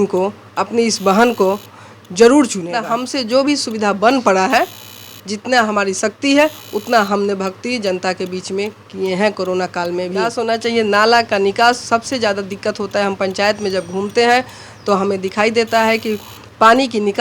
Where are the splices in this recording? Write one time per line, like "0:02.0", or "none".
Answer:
0:02.9
0:10.4

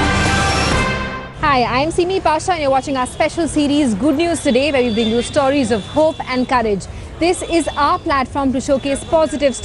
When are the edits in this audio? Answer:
0:01.2

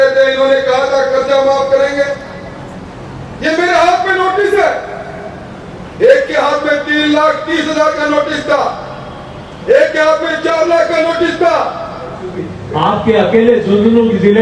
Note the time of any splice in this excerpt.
0:12.6

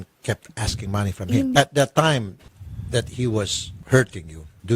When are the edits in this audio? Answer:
0:01.5

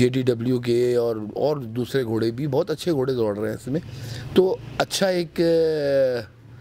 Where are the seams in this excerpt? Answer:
none

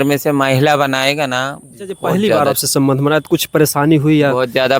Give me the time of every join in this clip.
0:02.1

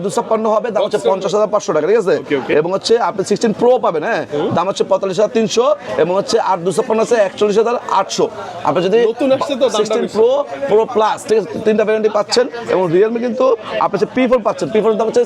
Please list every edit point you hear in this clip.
none

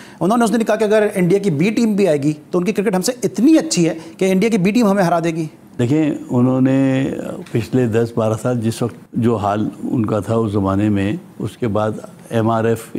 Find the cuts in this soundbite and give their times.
0:09.0

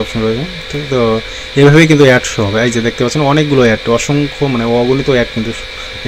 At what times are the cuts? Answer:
none

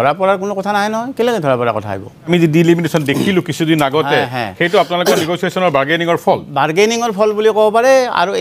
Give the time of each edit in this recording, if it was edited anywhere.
0:02.3

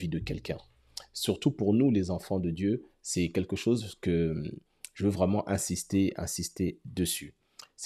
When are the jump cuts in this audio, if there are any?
none

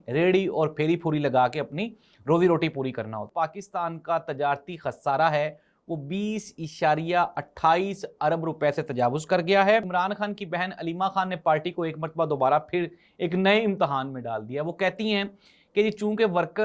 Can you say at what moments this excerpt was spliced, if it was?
0:03.3
0:09.9

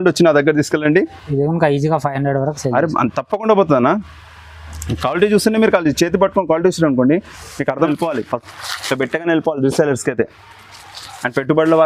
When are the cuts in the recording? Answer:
0:07.8

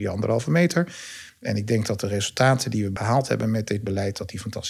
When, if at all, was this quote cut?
0:02.9

